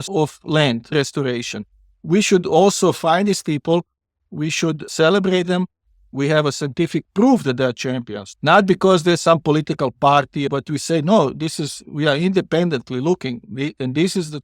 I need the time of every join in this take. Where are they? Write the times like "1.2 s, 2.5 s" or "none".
0.9 s, 6.1 s, 10.5 s